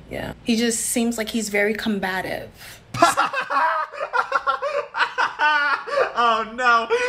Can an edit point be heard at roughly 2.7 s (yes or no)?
no